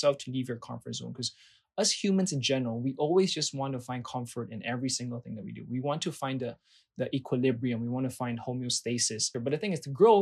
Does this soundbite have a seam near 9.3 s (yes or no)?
yes